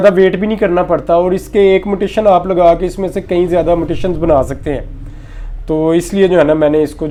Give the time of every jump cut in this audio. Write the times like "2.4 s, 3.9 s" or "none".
none